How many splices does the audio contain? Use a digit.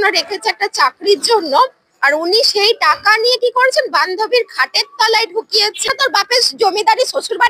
1